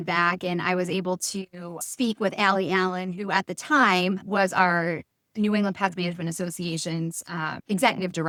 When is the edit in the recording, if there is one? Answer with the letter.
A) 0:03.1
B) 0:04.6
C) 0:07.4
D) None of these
D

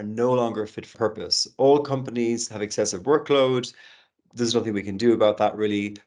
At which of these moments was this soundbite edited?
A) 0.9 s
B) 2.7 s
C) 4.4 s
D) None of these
A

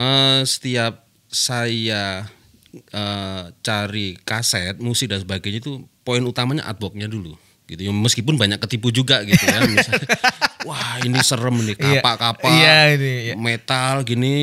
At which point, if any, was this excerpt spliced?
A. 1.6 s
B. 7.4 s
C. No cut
B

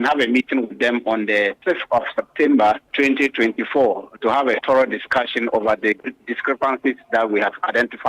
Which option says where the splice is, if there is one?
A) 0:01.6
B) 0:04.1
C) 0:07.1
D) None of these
A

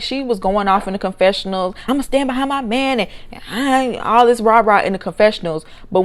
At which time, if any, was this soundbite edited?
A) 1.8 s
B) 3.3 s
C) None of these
A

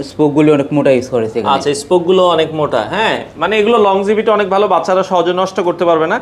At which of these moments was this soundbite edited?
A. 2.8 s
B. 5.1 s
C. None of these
C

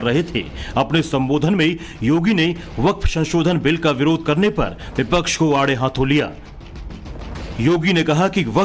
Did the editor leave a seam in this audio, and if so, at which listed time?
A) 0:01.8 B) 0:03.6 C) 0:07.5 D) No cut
B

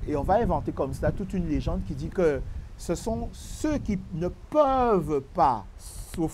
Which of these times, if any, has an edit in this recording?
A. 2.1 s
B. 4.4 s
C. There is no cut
A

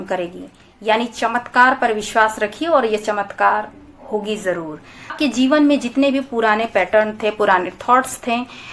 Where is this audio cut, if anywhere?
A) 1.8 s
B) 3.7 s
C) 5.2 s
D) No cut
C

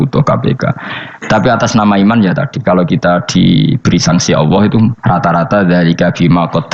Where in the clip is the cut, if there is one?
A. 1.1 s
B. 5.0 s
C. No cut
B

